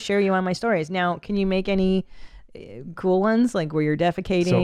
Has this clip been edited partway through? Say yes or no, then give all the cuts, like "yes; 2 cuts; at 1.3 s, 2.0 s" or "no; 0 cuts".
no; 0 cuts